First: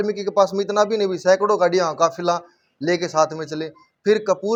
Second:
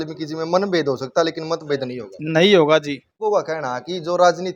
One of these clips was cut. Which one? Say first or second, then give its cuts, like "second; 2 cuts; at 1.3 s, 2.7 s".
second; 1 cut; at 3.2 s